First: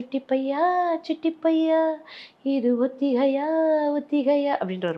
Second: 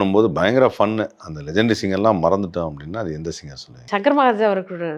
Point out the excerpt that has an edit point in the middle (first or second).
second